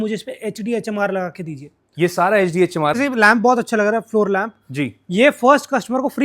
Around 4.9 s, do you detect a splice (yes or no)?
no